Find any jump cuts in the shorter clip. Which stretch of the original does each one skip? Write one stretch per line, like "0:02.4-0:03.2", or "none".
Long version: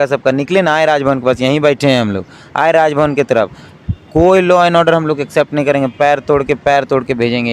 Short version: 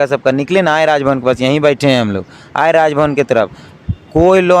none

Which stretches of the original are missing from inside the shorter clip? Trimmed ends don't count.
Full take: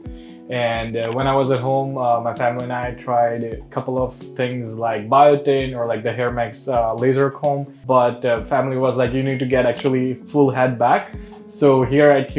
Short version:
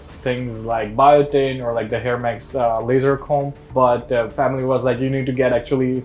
none

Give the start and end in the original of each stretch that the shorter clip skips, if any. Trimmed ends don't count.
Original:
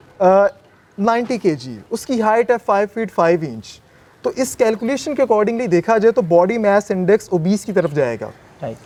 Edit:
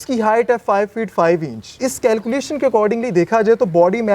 0:03.8-0:04.3

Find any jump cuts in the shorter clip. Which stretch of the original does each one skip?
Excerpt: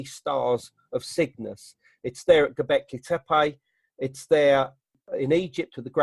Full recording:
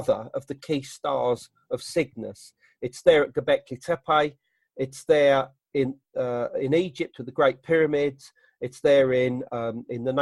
0:05.7-0:06.3

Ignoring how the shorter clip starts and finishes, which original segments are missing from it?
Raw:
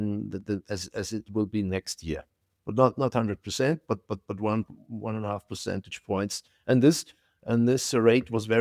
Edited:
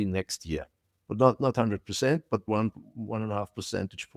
0:04.0-0:04.4

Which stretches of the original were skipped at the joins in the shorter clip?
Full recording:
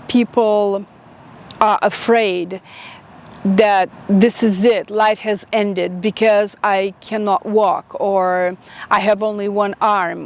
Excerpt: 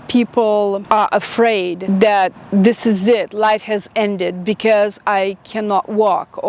0:00.8-0:01.5
0:02.5-0:03.4

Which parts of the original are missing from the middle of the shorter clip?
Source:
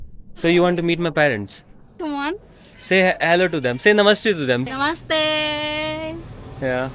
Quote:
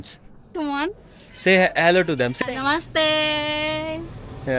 0:03.8-0:04.5

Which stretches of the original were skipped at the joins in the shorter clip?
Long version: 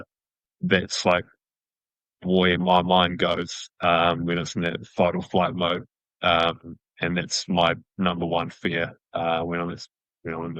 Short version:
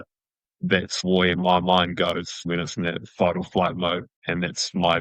0:00.9-0:02.1
0:03.7-0:04.2
0:05.9-0:06.9

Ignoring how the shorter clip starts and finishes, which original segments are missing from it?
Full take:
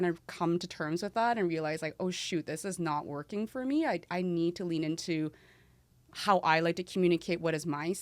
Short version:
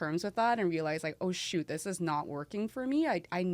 none

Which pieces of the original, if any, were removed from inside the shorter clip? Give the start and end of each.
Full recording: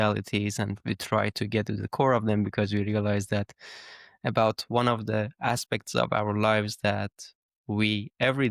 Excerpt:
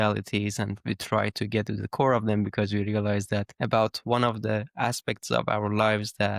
0:03.5-0:04.2

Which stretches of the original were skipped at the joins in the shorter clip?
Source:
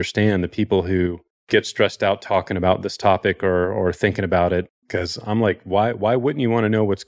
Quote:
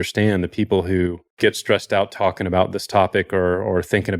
0:01.2-0:01.3

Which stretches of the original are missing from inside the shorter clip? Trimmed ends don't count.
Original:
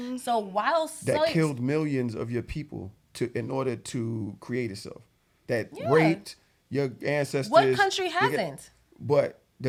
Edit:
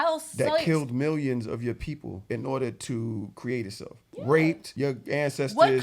0:02.9-0:03.3
0:05.2-0:05.8
0:06.3-0:06.6

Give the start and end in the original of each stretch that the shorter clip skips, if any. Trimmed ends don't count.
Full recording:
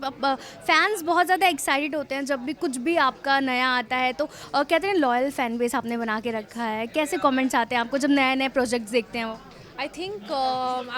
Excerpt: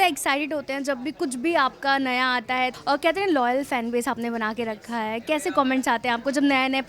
0:04.1-0:04.4

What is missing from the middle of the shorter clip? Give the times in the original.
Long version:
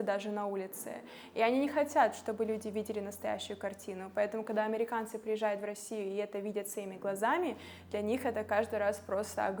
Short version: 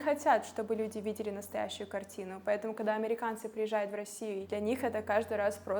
0:06.1-0:07.8

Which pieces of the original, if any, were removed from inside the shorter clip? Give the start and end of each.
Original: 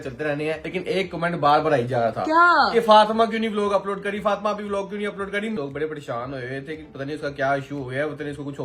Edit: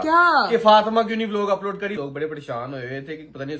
0:04.2-0:05.6

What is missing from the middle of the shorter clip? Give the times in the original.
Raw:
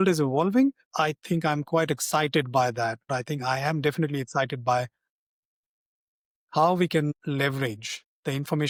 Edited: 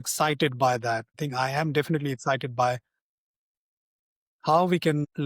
0:03.1-0:03.2

